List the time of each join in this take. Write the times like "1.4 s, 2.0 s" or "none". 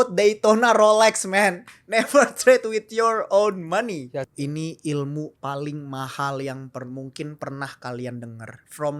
4.3 s